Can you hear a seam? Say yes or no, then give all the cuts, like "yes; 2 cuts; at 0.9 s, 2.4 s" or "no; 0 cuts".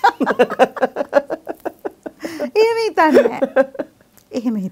no; 0 cuts